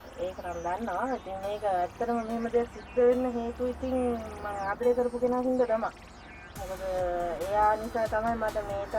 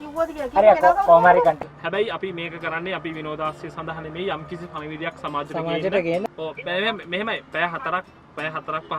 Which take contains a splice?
second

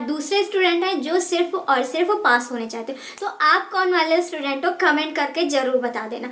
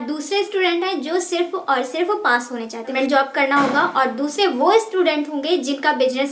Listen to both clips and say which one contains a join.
second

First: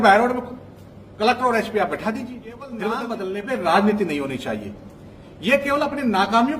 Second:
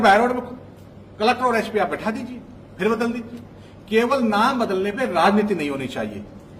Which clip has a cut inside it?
first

